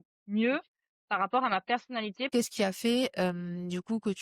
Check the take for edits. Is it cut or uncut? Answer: cut